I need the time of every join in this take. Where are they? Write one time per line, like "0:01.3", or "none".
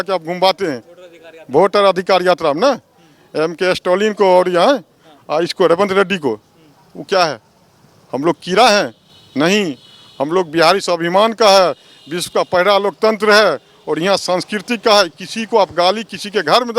none